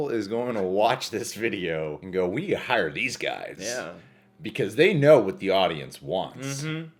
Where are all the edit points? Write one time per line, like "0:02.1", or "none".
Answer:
none

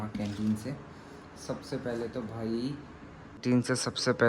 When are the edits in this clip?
0:03.3

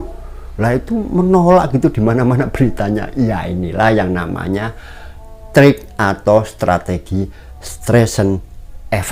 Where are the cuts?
none

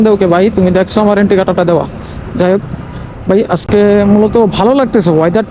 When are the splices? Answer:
none

